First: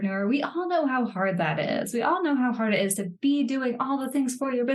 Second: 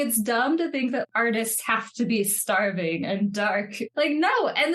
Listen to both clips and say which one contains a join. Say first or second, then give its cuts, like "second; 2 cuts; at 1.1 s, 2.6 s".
second; 2 cuts; at 1.0 s, 3.9 s